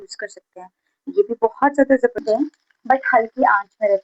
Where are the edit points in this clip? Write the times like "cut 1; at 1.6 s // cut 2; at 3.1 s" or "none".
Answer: cut 1; at 2.2 s